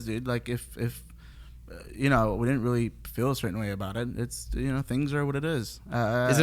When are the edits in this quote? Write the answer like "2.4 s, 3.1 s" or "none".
none